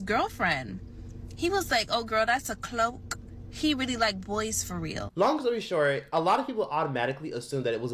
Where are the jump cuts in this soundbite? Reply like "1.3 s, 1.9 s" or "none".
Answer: none